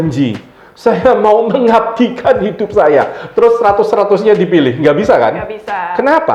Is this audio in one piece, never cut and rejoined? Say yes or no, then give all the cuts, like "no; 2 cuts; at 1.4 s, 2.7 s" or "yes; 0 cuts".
yes; 0 cuts